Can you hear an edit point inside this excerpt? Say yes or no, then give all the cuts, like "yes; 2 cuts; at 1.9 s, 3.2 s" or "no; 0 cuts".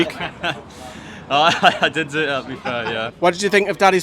yes; 1 cut; at 3.1 s